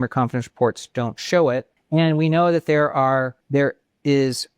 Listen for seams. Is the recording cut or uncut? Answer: cut